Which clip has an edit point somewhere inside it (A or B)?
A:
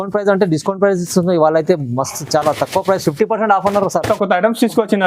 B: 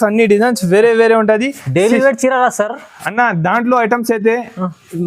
A